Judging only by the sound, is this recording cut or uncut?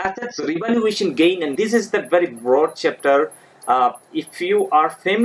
cut